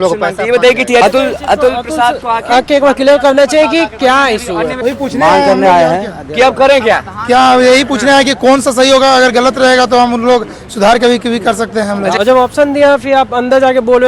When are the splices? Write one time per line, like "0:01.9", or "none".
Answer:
0:01.0
0:04.7
0:12.2